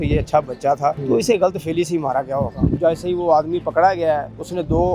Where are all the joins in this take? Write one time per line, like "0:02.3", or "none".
0:01.0
0:02.8